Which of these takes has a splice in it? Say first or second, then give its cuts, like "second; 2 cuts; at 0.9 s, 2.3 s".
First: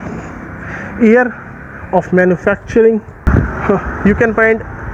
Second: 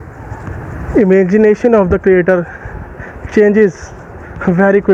first; 1 cut; at 3.2 s